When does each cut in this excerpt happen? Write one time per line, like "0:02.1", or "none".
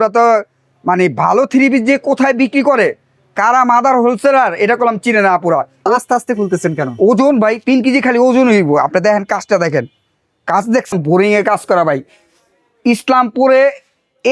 0:05.7
0:10.9

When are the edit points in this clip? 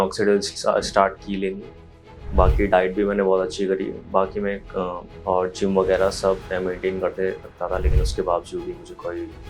0:05.1

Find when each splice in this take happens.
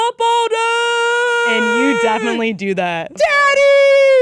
0:03.1

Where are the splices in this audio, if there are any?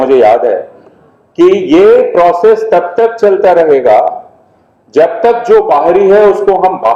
none

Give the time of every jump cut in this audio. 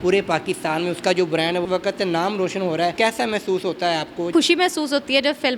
0:01.6
0:02.9
0:04.3

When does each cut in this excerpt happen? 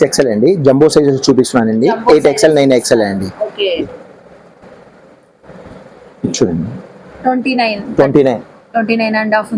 0:03.8

